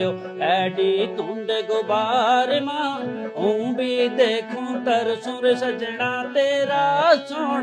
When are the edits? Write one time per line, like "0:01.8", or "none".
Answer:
none